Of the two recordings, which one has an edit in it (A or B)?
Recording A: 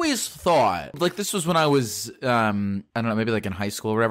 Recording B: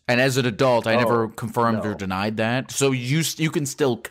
A